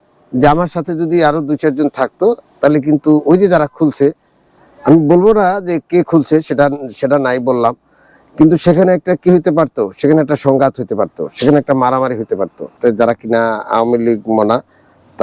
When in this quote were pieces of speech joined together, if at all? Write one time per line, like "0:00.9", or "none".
0:12.8